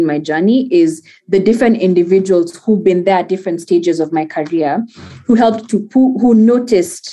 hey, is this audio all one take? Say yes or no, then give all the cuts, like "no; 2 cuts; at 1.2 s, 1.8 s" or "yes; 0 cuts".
yes; 0 cuts